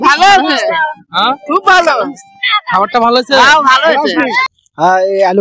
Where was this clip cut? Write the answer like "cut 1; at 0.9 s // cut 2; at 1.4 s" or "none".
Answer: cut 1; at 4.4 s